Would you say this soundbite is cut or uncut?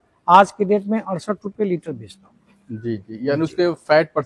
uncut